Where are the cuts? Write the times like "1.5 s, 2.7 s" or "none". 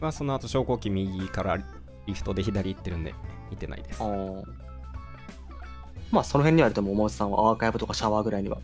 none